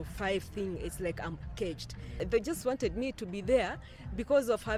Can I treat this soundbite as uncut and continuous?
no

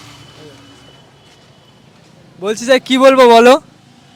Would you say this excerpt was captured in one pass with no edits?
yes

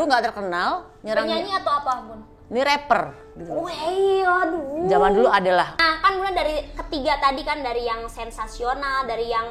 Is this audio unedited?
no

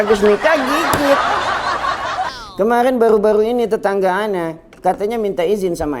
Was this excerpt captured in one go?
no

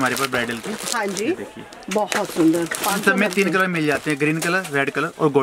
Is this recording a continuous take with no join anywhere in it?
yes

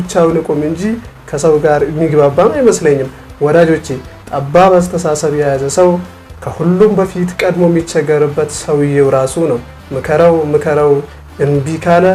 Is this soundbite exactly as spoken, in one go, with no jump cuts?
yes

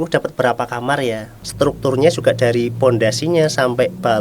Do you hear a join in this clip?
yes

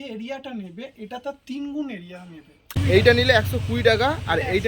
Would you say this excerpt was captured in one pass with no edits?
no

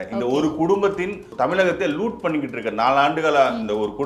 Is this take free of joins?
no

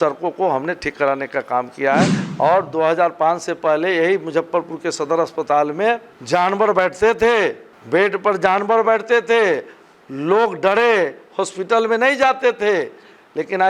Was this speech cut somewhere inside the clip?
yes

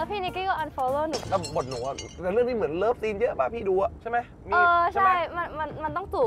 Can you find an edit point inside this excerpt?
yes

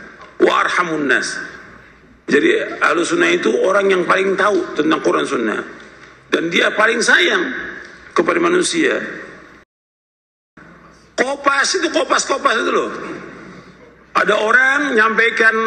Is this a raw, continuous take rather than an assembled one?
no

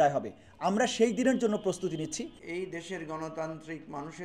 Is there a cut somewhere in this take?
yes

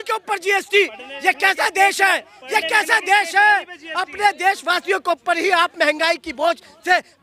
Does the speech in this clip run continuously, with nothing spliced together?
yes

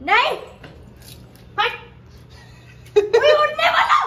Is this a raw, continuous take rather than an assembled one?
yes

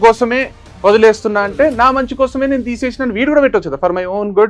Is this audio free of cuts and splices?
yes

